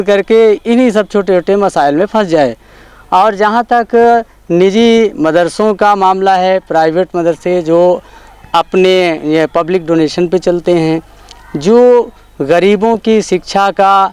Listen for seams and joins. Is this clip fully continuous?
yes; 0 cuts

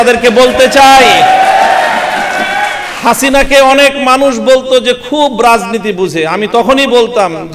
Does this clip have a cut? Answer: no; 0 cuts

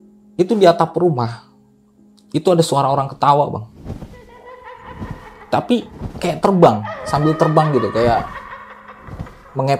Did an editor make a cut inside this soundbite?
no; 0 cuts

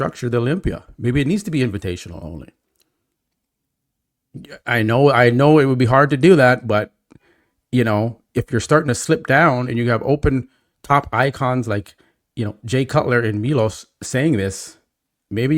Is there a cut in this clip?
no; 0 cuts

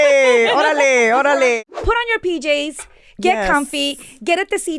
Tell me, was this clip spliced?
yes; 1 cut; at 1.6 s

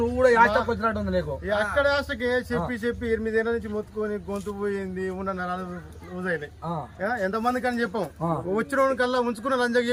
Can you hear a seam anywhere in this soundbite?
no; 0 cuts

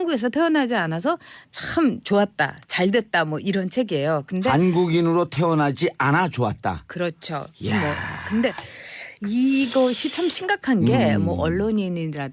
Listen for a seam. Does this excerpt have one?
yes; 1 cut; at 10.2 s

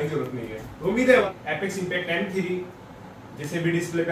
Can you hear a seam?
yes; 1 cut; at 1.2 s

